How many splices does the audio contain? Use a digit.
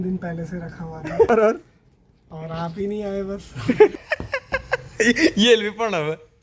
2